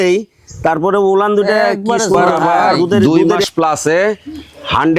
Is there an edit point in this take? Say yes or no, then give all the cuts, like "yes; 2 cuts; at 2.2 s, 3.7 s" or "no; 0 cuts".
yes; 1 cut; at 3.0 s